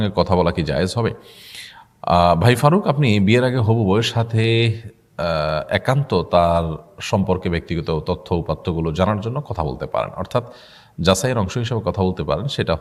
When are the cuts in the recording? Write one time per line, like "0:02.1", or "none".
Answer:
none